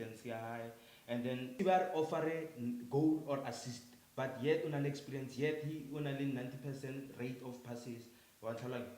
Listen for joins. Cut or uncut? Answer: cut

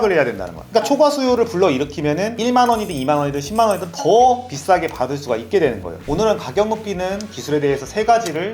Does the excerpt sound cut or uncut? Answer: cut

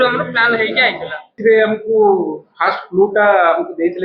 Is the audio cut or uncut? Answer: cut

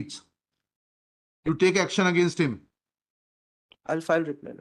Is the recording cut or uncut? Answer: uncut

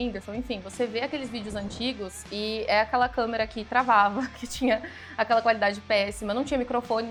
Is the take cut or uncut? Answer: uncut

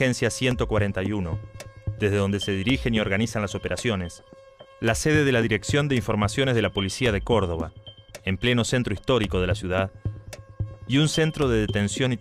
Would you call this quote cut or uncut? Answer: cut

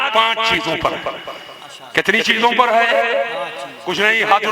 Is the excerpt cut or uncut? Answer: uncut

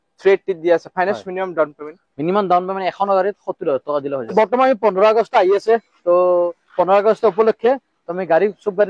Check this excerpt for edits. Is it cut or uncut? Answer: cut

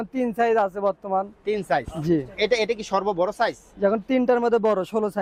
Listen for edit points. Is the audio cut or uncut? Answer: uncut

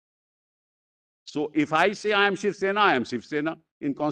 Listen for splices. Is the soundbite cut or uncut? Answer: uncut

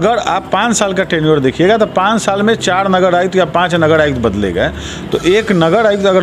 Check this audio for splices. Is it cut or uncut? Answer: uncut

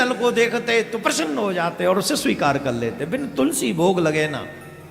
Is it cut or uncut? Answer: uncut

